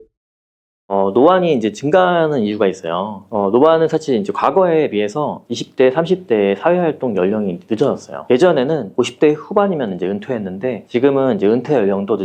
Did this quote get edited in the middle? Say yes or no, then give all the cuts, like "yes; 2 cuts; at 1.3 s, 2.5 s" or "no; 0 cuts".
no; 0 cuts